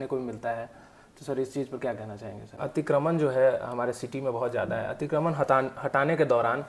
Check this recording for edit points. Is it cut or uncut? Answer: cut